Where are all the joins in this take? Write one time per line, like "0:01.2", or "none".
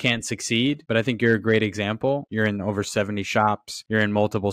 0:02.3